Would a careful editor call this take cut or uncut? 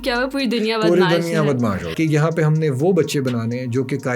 cut